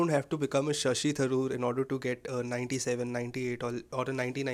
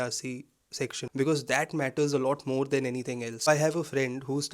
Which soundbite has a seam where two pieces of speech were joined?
second; 2 cuts; at 1.0 s, 3.3 s

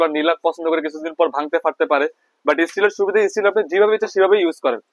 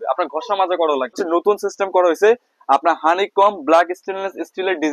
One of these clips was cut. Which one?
second; 1 cut; at 1.2 s

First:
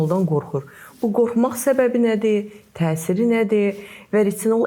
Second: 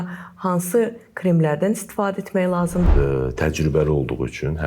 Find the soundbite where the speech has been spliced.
second; 1 cut; at 2.9 s

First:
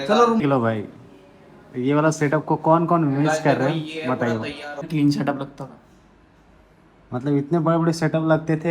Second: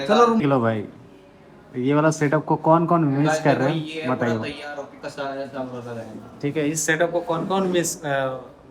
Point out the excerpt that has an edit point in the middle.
first; 1 cut; at 4.9 s

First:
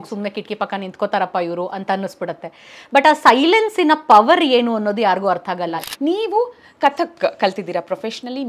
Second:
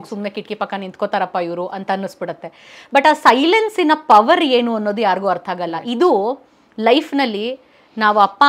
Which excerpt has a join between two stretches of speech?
first; 1 cut; at 5.8 s

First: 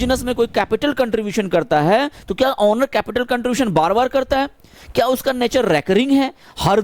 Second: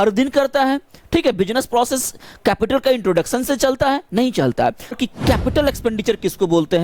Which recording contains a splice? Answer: second; 1 cut; at 5.0 s

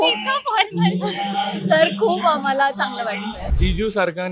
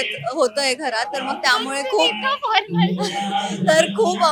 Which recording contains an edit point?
first; 1 cut; at 3.4 s

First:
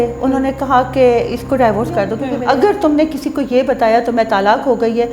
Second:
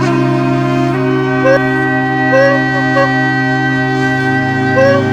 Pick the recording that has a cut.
first; 1 cut; at 2.3 s

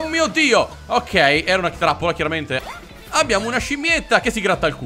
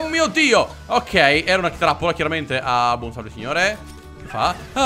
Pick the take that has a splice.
first; 1 cut; at 2.6 s

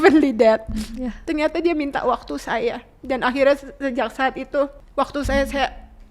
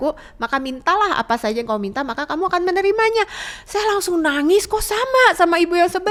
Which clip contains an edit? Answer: first; 1 cut; at 4.8 s

